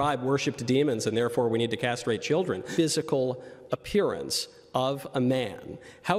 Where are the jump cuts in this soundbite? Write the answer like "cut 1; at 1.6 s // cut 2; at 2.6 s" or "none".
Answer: cut 1; at 2.7 s

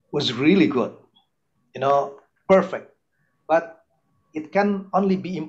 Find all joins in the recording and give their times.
none

